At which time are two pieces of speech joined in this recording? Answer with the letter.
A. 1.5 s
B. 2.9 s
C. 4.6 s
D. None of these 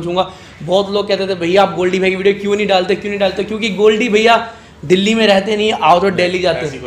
D